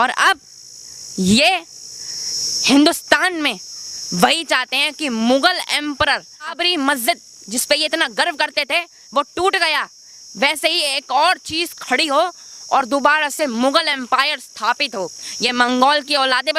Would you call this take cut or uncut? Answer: uncut